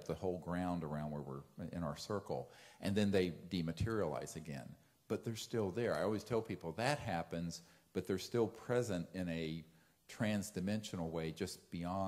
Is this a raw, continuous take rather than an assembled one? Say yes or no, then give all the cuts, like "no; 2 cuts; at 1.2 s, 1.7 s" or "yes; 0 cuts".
no; 1 cut; at 1.5 s